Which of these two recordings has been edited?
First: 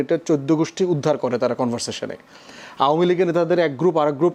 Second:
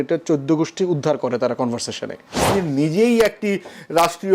second; 1 cut; at 2.5 s

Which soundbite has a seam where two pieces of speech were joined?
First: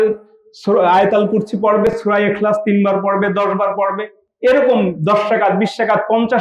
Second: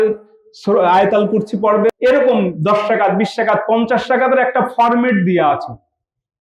second; 1 cut; at 1.9 s

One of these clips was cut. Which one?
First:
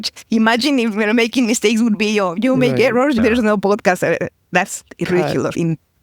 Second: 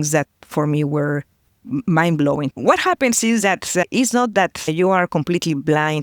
second; 2 cuts; at 1.7 s, 2.5 s

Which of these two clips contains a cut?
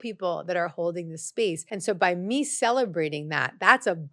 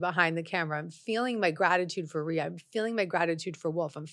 first; 1 cut; at 1.7 s

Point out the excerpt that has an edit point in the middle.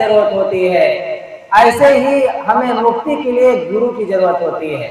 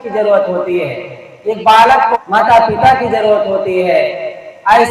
second; 1 cut; at 2.2 s

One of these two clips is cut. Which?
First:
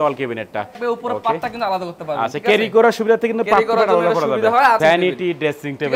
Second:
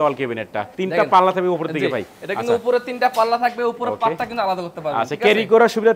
first; 2 cuts; at 0.8 s, 4.8 s

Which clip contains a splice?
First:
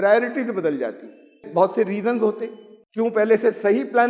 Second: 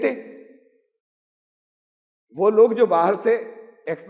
first; 2 cuts; at 1.4 s, 2.8 s

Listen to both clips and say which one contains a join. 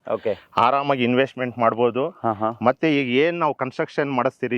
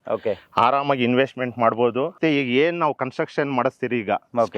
second; 1 cut; at 2.2 s

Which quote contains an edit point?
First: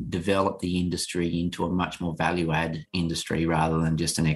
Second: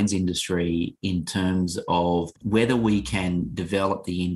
second; 1 cut; at 2.4 s

